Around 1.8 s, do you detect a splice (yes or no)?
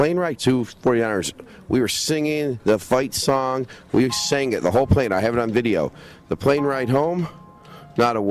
no